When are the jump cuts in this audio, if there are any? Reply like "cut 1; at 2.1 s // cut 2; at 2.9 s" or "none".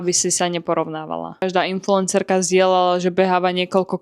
cut 1; at 1.4 s